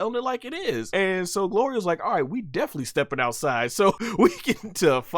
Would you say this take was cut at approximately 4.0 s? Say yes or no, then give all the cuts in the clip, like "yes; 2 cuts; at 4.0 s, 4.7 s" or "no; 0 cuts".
yes; 2 cuts; at 0.9 s, 4.0 s